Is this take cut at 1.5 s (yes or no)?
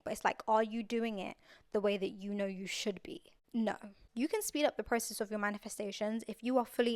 no